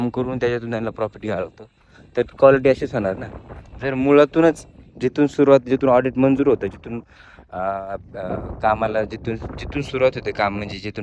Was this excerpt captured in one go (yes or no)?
yes